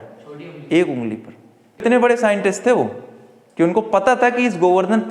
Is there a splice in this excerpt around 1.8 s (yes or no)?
yes